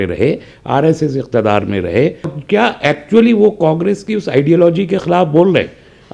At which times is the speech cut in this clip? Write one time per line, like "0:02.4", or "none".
0:02.4